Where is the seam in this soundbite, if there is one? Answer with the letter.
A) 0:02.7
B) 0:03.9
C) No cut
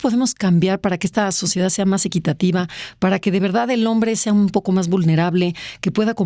C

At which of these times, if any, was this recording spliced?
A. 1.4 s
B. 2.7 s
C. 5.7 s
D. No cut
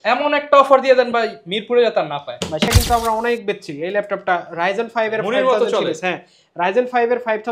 B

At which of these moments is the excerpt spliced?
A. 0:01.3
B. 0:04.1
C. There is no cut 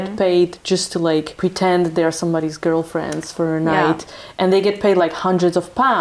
A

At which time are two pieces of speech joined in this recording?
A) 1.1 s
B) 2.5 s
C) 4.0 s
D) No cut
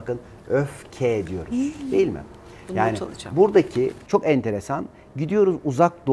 D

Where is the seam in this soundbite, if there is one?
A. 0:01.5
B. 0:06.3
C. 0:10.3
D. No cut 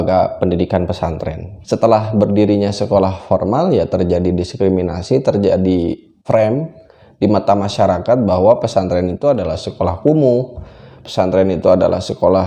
A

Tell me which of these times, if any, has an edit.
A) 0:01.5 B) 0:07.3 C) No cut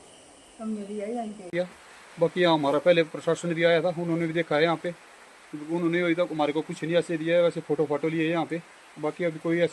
A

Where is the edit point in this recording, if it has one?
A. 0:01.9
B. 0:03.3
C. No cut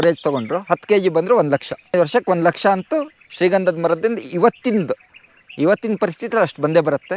A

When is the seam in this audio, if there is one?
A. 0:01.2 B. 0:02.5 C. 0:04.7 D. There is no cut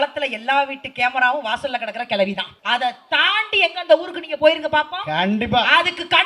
B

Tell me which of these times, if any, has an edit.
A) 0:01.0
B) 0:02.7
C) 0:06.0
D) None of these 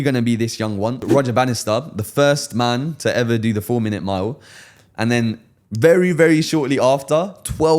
A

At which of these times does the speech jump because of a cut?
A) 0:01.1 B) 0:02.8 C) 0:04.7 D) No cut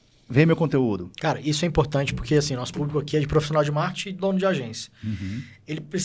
D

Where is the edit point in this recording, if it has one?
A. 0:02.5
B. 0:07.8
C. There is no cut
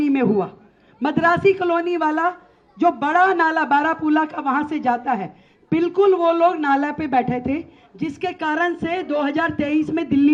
C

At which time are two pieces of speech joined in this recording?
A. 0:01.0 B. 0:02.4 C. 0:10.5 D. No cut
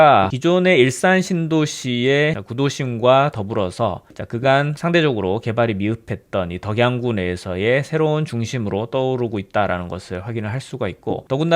B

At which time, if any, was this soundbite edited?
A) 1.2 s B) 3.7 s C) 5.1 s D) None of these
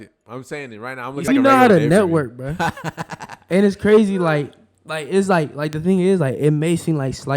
A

